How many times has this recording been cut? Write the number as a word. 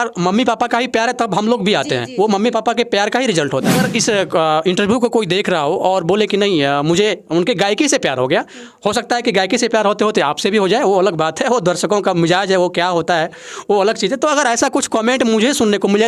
one